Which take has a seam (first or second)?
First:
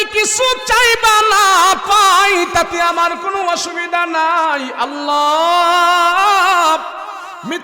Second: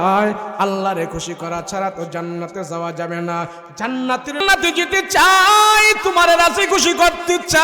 second